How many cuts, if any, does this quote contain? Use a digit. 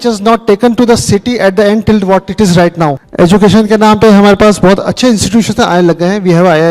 1